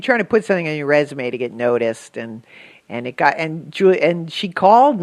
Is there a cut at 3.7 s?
yes; 1 cut; at 3.7 s

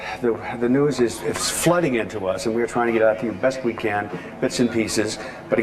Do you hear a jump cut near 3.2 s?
yes; 1 cut; at 3.2 s

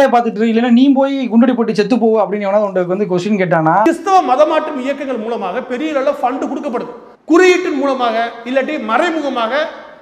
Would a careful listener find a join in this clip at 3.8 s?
yes; 1 cut; at 3.8 s

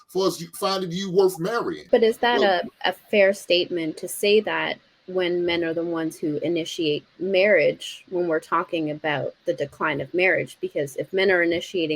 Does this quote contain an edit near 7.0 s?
no; 1 cut; at 1.8 s

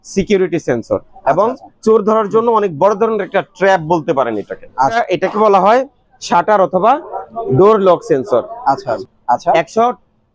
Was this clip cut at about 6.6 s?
no; 3 cuts; at 1.1 s, 5.0 s, 9.0 s

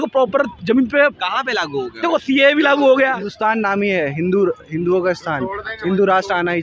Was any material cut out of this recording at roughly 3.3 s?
yes; 1 cut; at 3.3 s

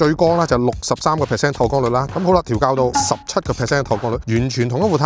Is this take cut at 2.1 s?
yes; 1 cut; at 2.1 s

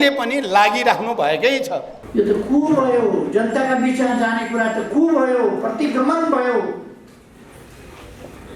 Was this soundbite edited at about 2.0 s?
yes; 1 cut; at 2.0 s

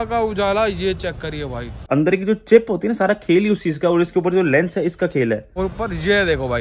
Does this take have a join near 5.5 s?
yes; 2 cuts; at 1.8 s, 5.5 s

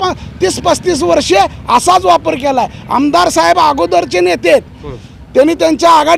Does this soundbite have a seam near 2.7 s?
no; 0 cuts

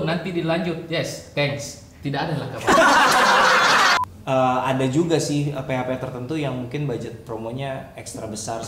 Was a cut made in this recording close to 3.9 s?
yes; 1 cut; at 3.9 s

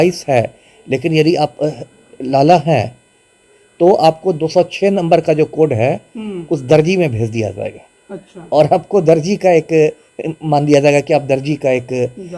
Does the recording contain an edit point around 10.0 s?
no; 0 cuts

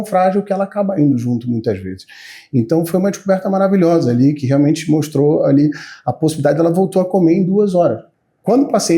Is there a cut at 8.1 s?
yes; 1 cut; at 8.1 s

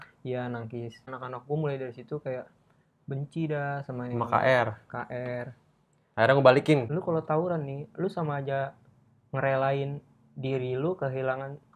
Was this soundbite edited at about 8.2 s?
no; 2 cuts; at 1.1 s, 6.9 s

